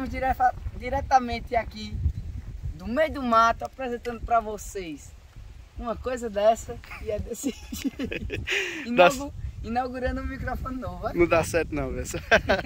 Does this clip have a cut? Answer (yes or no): no